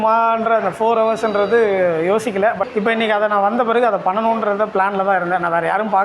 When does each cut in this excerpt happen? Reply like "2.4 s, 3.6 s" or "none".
2.6 s